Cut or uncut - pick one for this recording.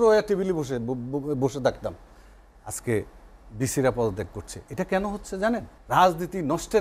cut